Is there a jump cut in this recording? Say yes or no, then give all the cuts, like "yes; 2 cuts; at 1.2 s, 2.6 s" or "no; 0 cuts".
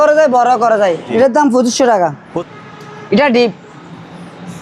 yes; 2 cuts; at 1.1 s, 2.3 s